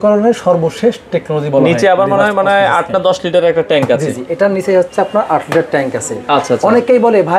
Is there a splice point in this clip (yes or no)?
no